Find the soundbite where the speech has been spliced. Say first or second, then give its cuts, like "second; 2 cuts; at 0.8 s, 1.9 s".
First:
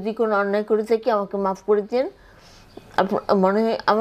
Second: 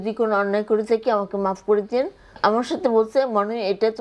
second; 1 cut; at 2.3 s